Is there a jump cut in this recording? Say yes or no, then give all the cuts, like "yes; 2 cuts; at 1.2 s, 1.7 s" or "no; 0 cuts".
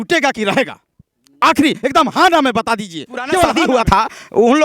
yes; 1 cut; at 3.5 s